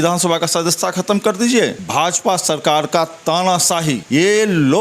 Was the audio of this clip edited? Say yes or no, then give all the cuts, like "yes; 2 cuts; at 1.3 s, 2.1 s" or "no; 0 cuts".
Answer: yes; 2 cuts; at 1.8 s, 4.0 s